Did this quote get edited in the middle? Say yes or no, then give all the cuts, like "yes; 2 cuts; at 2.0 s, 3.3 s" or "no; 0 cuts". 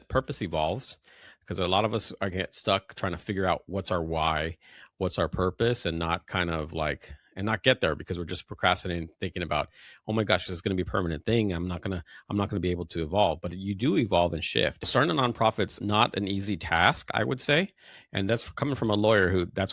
yes; 3 cuts; at 2.3 s, 14.9 s, 15.8 s